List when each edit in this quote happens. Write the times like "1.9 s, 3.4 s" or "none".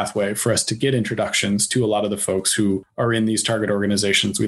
2.9 s